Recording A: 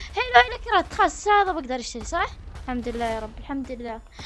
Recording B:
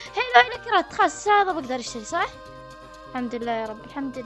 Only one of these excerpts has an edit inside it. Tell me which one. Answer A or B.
A